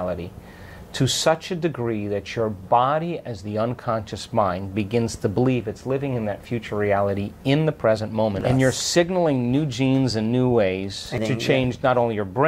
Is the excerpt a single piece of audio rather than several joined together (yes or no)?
no